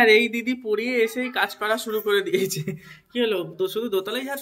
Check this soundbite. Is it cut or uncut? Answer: uncut